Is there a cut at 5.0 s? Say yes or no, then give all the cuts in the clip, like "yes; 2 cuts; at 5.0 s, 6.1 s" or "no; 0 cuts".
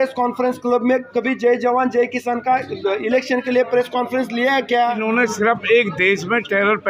yes; 1 cut; at 5.0 s